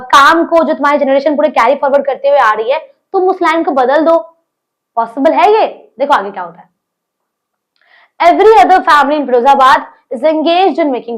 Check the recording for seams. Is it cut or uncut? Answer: uncut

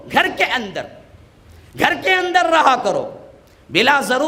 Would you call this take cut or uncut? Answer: uncut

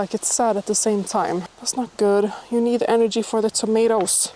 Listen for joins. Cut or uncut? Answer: cut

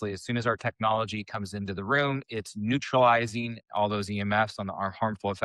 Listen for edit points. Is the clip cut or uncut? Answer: uncut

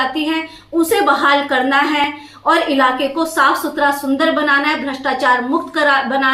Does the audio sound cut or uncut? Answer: uncut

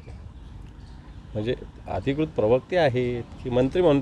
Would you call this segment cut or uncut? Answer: uncut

